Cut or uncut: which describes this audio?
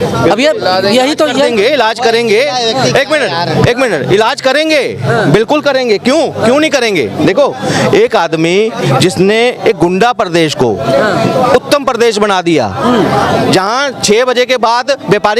uncut